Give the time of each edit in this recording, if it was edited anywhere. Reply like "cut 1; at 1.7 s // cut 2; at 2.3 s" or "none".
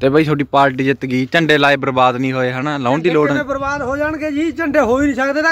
none

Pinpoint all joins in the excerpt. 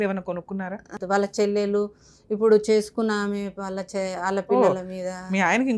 cut 1; at 1.0 s

